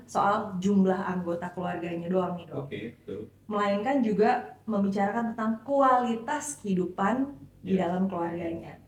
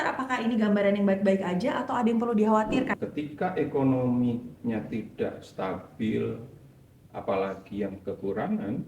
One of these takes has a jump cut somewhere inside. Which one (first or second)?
second